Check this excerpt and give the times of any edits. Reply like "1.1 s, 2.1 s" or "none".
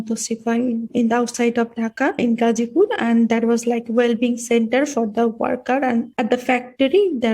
0.9 s, 2.2 s, 6.1 s